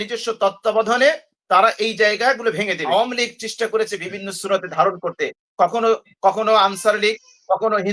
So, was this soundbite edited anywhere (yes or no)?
yes